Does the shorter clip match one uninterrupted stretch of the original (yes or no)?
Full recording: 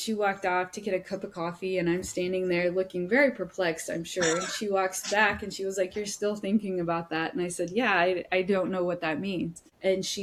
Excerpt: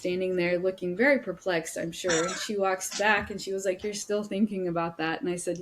yes